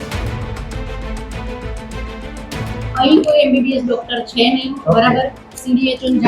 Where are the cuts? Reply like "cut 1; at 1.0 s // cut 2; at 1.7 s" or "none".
cut 1; at 2.9 s